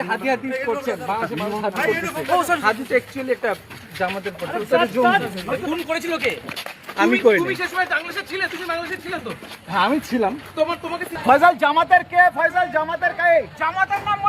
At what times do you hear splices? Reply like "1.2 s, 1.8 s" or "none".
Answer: 11.1 s